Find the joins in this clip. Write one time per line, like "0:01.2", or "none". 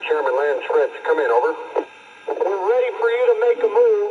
0:02.2